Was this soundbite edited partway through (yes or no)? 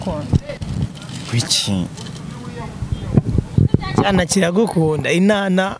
no